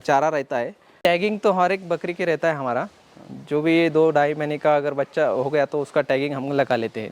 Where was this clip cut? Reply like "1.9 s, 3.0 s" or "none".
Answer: 1.0 s